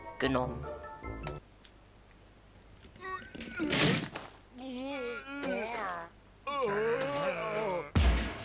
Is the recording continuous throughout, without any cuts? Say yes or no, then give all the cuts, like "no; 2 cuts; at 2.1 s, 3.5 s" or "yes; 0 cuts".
no; 1 cut; at 1.4 s